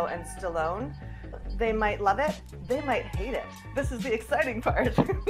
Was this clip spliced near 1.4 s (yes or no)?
yes